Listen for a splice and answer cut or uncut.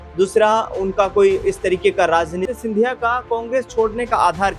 cut